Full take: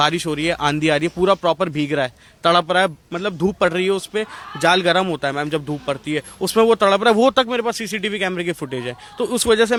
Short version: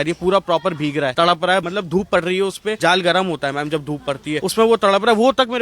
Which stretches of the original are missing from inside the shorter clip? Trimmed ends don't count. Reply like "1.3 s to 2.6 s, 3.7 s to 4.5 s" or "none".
2.4 s to 2.9 s, 4.3 s to 4.6 s, 6.2 s to 6.4 s

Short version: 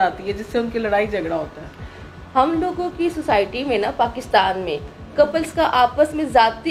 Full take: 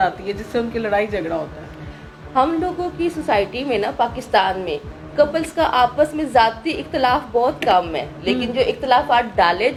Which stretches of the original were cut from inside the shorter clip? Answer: none

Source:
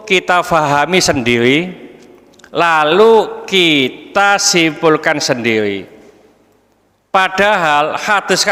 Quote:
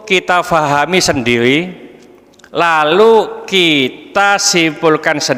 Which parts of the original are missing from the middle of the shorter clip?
none

